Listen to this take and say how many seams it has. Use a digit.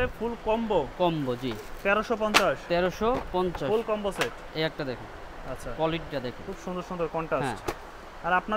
0